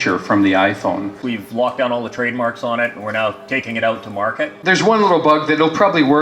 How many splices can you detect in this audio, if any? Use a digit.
2